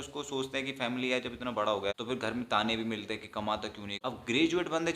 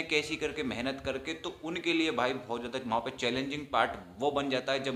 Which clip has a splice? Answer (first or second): first